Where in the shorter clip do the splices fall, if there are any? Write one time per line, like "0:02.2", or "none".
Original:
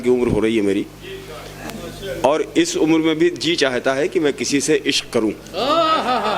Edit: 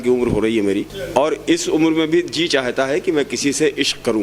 0:01.0